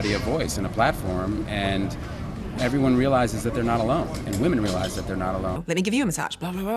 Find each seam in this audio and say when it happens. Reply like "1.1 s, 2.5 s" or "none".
5.6 s